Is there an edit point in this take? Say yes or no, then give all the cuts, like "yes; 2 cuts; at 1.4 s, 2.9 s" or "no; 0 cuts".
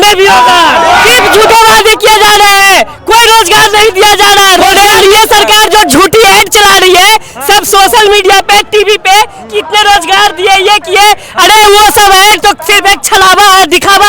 yes; 2 cuts; at 1.2 s, 4.6 s